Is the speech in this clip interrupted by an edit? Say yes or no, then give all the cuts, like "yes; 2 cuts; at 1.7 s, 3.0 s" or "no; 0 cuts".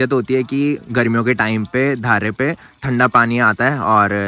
no; 0 cuts